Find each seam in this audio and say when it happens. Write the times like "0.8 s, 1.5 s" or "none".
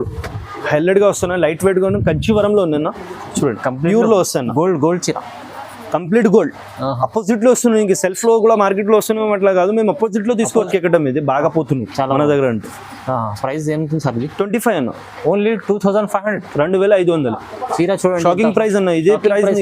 10.7 s